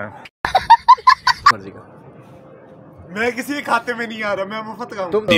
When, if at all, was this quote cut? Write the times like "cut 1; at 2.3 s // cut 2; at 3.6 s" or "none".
cut 1; at 1.5 s